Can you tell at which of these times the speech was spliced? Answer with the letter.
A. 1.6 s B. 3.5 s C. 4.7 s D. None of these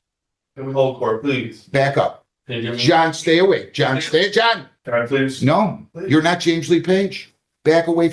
C